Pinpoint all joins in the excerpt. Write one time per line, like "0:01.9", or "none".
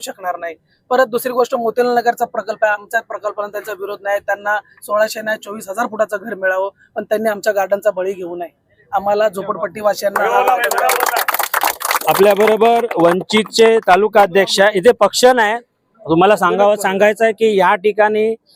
none